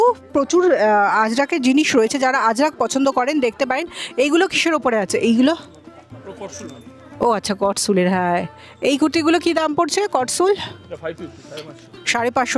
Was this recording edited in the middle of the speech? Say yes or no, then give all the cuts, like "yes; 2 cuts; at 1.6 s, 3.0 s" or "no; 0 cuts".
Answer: no; 0 cuts